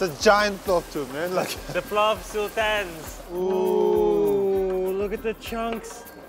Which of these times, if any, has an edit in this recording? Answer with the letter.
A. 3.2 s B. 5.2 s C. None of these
A